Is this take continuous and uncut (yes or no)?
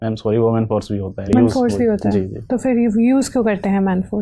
no